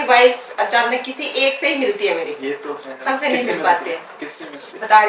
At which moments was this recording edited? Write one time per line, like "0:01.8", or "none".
none